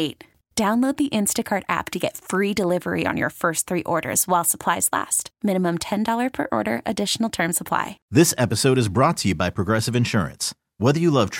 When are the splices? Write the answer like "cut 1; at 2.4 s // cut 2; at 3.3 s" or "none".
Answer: cut 1; at 8.0 s